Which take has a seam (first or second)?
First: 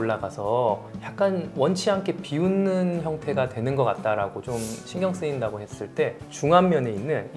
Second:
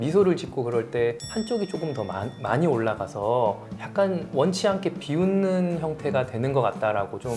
first